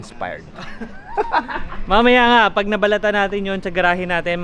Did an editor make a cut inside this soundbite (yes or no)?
no